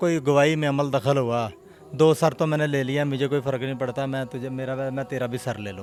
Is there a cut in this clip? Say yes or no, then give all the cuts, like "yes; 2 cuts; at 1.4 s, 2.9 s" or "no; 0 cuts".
no; 0 cuts